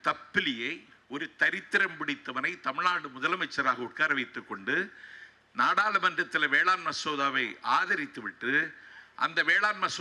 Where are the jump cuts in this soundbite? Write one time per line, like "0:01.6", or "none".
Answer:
0:00.9